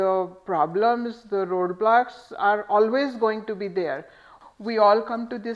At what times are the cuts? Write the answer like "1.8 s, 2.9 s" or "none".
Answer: 4.3 s